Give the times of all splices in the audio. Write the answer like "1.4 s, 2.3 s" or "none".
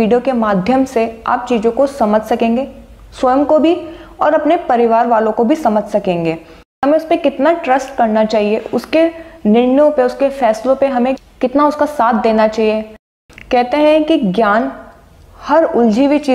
6.6 s, 13.1 s